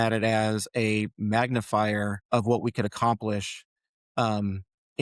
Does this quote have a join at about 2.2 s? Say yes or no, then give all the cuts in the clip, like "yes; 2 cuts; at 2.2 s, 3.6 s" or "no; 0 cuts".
yes; 1 cut; at 2.2 s